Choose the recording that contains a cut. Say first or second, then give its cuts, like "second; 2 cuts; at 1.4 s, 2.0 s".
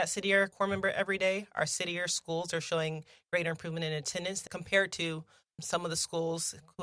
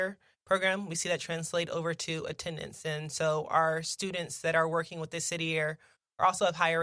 first; 1 cut; at 4.4 s